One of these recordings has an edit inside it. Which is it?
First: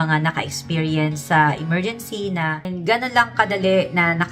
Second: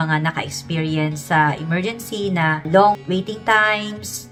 first; 1 cut; at 2.7 s

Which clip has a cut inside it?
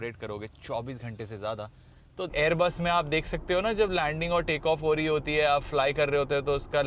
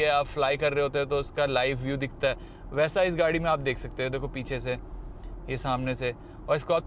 first; 1 cut; at 2.3 s

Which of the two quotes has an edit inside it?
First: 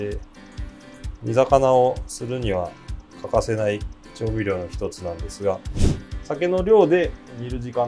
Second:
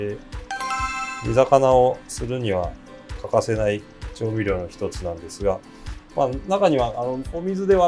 first; 1 cut; at 6.0 s

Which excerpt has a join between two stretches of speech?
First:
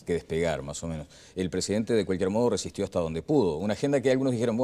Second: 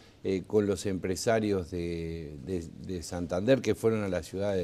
first; 1 cut; at 1.2 s

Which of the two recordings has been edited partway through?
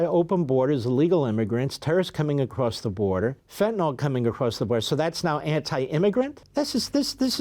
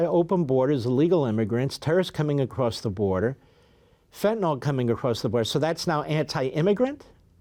first; 2 cuts; at 3.4 s, 6.4 s

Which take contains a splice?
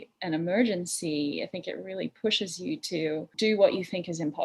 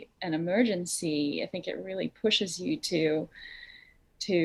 first; 1 cut; at 3.3 s

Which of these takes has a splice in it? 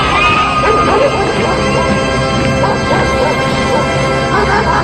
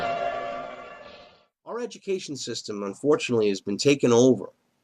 second; 1 cut; at 1.9 s

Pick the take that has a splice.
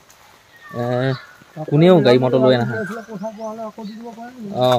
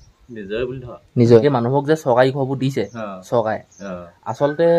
second; 1 cut; at 1.4 s

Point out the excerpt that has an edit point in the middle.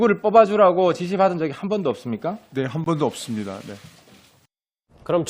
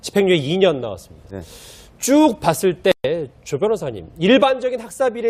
second; 1 cut; at 1.6 s

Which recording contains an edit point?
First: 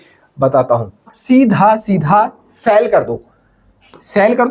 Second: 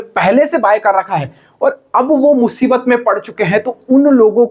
first; 1 cut; at 1.1 s

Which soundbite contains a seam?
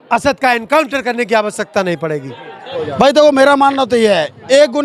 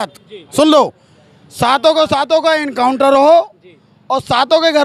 first; 1 cut; at 2.5 s

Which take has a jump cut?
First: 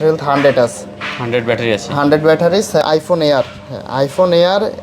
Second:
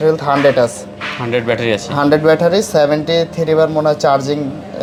first; 1 cut; at 2.8 s

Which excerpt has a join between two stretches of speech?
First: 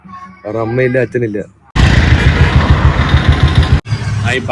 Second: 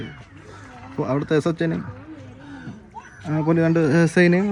first; 1 cut; at 1.6 s

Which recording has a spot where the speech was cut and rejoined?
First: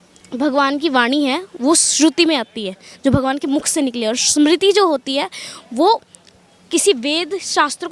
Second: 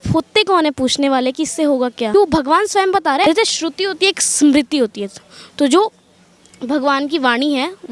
second; 2 cuts; at 2.1 s, 3.2 s

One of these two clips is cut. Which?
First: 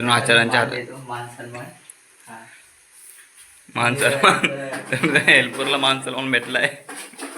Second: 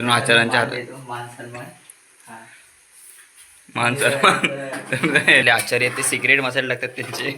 second; 1 cut; at 5.4 s

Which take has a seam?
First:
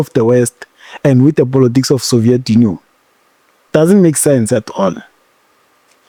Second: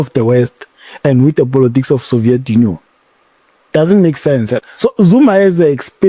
second; 1 cut; at 4.7 s

